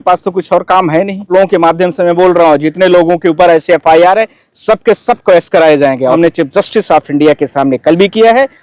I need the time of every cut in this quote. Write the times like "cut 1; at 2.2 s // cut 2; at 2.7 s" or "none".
cut 1; at 1.3 s // cut 2; at 6.1 s